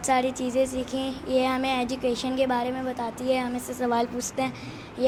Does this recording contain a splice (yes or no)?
no